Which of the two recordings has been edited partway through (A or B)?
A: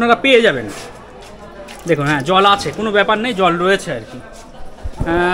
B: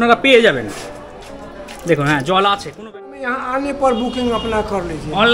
B